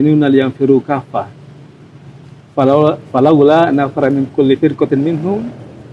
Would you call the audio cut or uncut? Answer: uncut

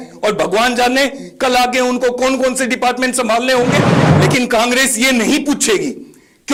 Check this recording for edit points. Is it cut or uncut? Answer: uncut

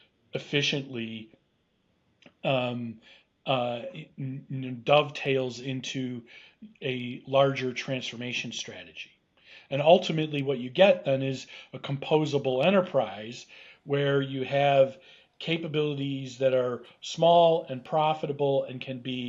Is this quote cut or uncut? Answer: uncut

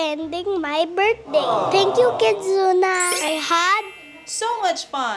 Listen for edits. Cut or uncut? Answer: cut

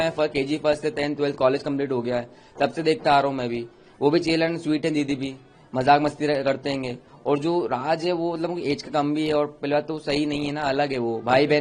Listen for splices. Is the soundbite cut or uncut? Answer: uncut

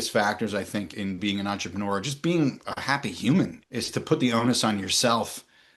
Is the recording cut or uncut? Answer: cut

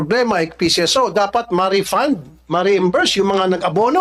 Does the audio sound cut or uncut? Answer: uncut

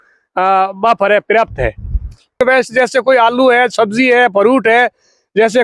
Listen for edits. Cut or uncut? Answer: cut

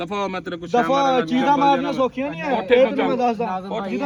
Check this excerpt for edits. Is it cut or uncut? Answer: uncut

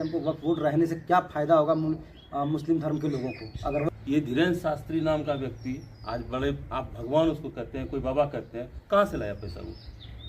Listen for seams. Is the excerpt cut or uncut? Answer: cut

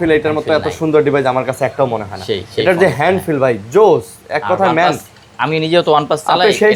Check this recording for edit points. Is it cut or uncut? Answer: uncut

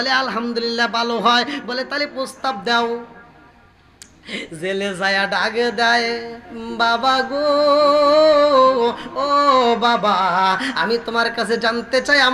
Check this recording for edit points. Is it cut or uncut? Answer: uncut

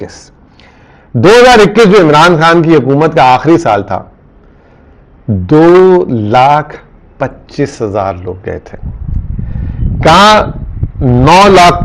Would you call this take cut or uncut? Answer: uncut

